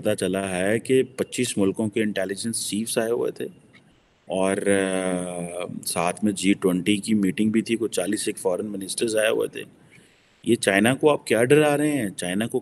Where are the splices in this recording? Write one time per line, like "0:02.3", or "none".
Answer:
none